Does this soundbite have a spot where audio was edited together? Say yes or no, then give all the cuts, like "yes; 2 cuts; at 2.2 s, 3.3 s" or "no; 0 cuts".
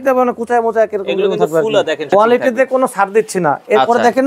yes; 1 cut; at 2.0 s